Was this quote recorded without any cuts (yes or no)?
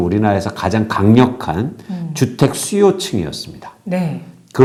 yes